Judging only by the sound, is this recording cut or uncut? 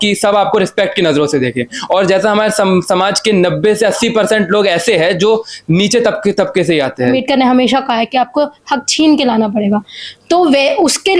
cut